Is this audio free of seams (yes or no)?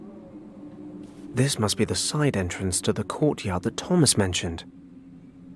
no